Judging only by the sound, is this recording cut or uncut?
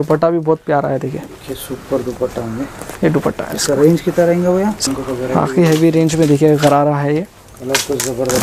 cut